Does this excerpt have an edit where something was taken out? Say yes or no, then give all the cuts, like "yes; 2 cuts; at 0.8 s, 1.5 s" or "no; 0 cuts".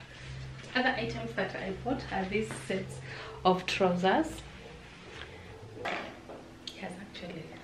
yes; 1 cut; at 5.9 s